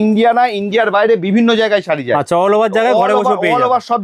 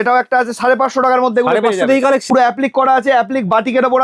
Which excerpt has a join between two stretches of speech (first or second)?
second